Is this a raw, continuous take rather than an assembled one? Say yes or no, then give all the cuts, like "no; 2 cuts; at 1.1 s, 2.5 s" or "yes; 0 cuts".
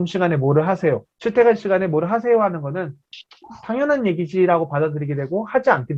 no; 1 cut; at 1.1 s